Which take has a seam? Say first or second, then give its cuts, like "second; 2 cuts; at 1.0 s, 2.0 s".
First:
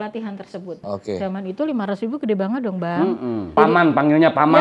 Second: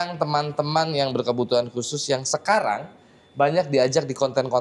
first; 2 cuts; at 0.8 s, 3.5 s